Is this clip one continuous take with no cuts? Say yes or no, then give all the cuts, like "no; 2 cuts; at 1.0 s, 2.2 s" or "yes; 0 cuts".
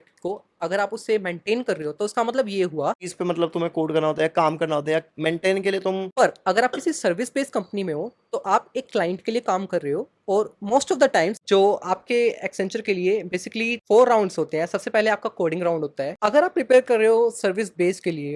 no; 4 cuts; at 3.0 s, 6.1 s, 11.4 s, 16.1 s